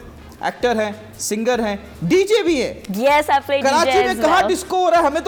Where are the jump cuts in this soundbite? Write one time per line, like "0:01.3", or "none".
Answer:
none